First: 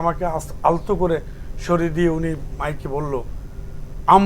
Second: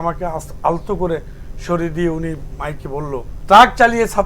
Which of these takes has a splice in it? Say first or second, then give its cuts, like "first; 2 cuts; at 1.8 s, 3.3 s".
second; 1 cut; at 3.3 s